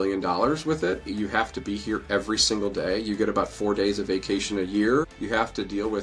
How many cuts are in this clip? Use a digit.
2